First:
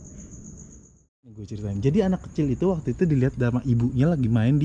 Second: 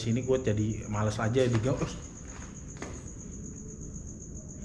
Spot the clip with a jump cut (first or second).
first